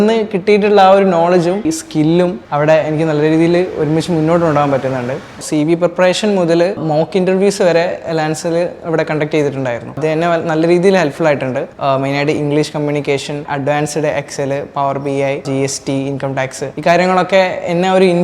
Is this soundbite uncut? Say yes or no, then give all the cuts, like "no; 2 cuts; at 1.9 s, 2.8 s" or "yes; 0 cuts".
no; 4 cuts; at 2.0 s, 5.4 s, 10.0 s, 11.7 s